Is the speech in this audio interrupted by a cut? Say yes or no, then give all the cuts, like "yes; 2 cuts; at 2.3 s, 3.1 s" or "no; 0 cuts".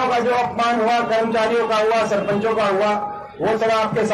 no; 0 cuts